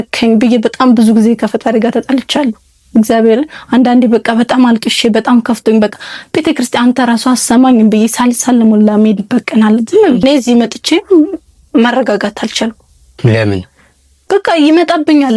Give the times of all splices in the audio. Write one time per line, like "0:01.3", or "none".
0:10.2